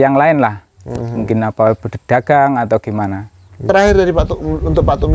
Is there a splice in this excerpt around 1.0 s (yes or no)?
no